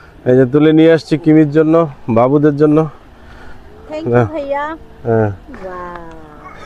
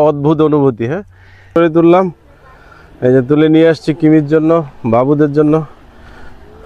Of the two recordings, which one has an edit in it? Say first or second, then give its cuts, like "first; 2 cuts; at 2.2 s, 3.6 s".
second; 1 cut; at 1.5 s